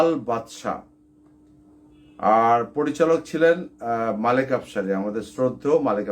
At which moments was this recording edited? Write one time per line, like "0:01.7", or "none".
0:01.3